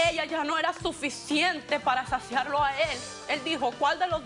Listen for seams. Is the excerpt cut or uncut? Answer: cut